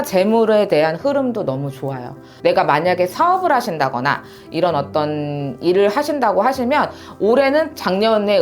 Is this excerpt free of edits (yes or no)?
no